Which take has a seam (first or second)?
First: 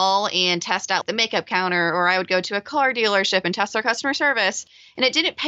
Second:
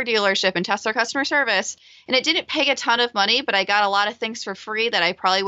first